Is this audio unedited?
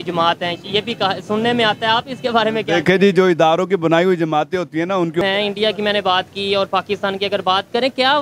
no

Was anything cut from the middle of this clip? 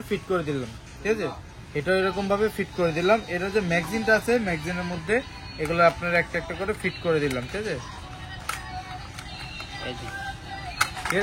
no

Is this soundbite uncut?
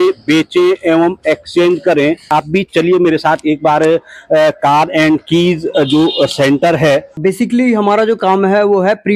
no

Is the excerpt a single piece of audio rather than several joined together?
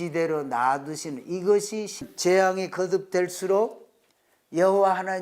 no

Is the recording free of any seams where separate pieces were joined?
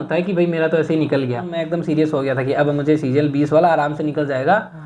no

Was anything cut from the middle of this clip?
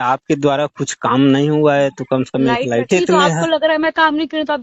yes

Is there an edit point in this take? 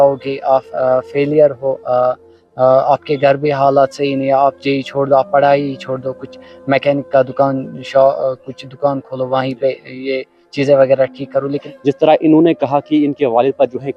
yes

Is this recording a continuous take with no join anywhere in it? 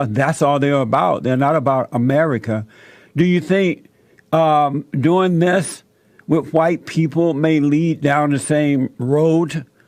yes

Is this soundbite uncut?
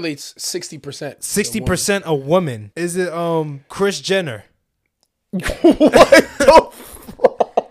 no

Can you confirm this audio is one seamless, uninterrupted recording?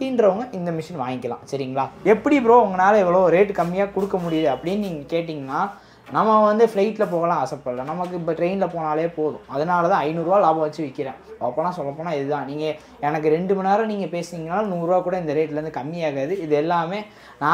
no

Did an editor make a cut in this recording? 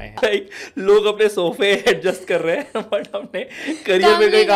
no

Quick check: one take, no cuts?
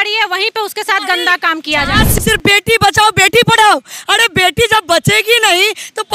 no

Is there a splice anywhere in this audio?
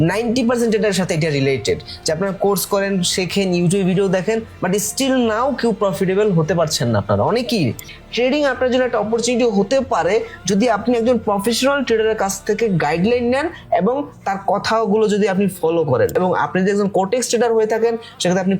yes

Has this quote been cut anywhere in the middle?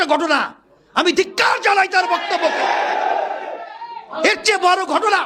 no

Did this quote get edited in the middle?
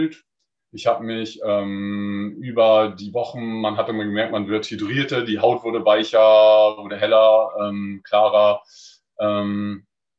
no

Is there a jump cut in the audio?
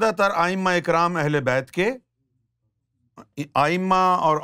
no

